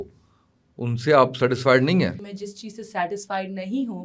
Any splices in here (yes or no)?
yes